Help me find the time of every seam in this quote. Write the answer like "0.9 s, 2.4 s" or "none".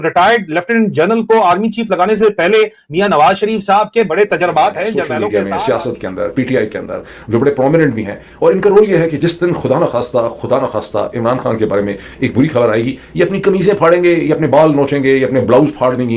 5.1 s